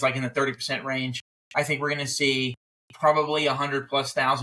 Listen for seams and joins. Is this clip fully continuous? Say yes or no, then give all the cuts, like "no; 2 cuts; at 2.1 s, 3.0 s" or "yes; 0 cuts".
yes; 0 cuts